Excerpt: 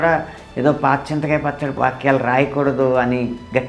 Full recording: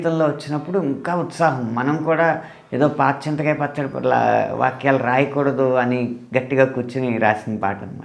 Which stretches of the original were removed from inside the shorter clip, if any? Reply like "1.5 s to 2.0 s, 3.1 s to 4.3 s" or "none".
3.9 s to 4.5 s